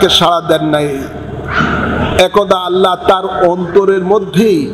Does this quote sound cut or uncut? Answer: uncut